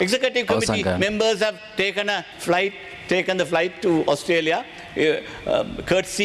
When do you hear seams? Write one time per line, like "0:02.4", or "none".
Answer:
0:02.3